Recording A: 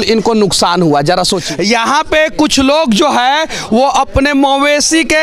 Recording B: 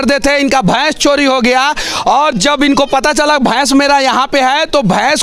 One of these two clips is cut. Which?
A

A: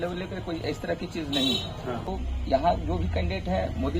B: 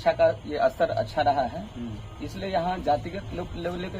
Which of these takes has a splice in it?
A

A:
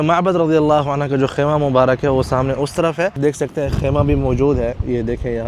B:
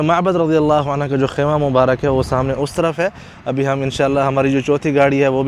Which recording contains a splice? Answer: A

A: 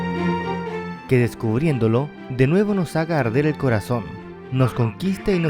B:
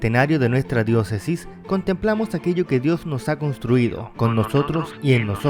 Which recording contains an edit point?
A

